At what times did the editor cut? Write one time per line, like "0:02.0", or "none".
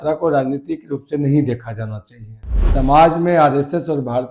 0:02.6